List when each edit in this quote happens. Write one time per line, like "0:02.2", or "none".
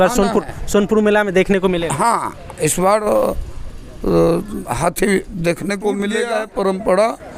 0:06.2